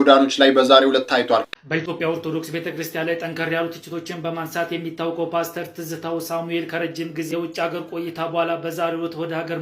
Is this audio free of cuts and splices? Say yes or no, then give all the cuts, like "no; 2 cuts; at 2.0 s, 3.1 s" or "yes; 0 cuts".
no; 1 cut; at 1.5 s